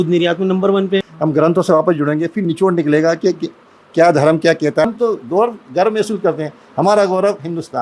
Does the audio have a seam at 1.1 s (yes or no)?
yes